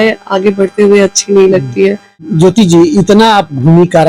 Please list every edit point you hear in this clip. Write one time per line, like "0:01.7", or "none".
0:02.2